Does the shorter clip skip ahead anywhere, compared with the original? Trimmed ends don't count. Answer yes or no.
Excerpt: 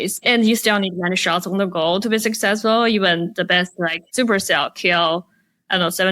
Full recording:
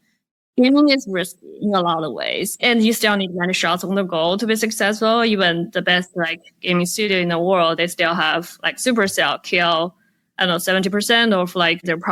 yes